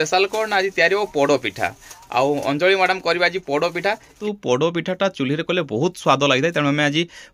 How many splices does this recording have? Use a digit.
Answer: 1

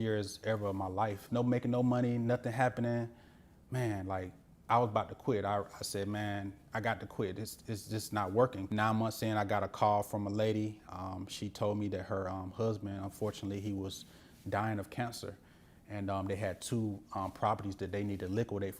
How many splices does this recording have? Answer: 2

